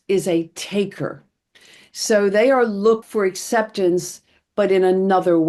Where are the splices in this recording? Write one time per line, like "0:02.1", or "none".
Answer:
0:03.0